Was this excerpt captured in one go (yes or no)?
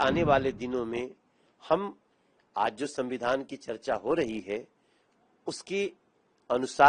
yes